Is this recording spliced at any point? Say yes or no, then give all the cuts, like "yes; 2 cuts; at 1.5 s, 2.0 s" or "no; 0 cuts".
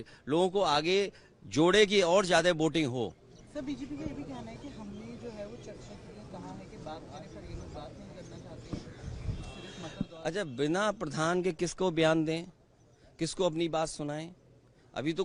no; 0 cuts